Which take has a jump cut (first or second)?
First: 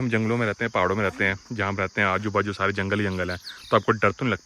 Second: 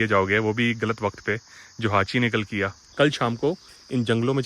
second